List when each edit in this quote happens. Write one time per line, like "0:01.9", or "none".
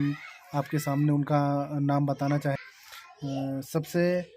0:02.6